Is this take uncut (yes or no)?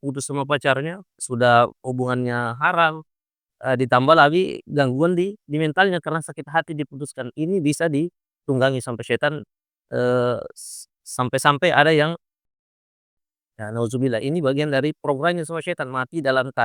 yes